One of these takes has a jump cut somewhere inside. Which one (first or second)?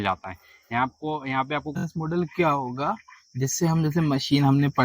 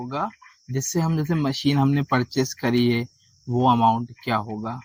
first